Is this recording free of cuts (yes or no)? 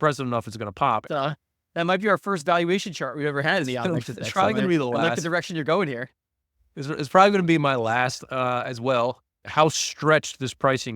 no